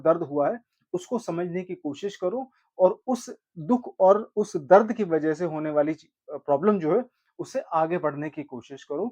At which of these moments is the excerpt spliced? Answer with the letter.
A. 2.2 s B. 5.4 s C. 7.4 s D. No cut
D